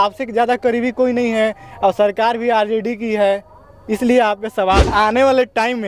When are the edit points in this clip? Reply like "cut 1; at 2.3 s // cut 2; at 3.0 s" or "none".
cut 1; at 4.9 s